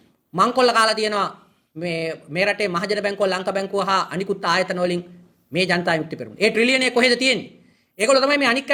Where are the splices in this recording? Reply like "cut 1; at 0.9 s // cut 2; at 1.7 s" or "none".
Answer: none